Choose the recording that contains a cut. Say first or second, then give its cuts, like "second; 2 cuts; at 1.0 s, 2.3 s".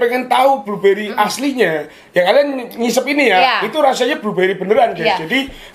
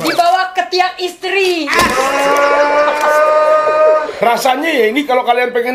second; 1 cut; at 4.2 s